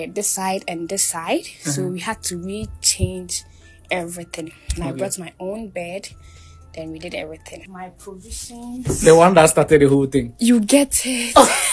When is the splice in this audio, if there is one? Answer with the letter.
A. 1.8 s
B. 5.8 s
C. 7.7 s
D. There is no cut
C